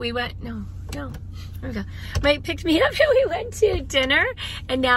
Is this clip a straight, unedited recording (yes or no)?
yes